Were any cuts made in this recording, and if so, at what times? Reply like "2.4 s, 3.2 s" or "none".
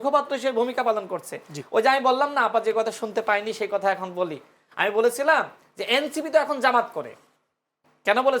none